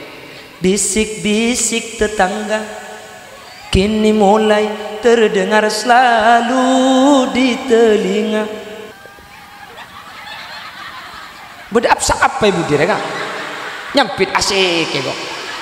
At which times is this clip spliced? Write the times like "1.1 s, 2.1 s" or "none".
8.9 s